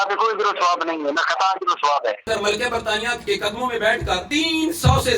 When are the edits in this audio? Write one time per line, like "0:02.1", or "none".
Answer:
0:02.3
0:04.2